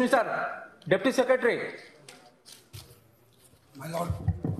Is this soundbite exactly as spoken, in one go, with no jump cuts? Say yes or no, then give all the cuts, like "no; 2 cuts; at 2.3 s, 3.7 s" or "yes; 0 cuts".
yes; 0 cuts